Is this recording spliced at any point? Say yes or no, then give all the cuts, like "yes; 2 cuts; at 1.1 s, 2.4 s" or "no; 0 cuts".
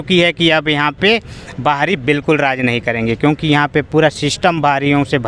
no; 0 cuts